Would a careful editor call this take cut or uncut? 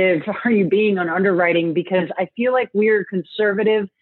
uncut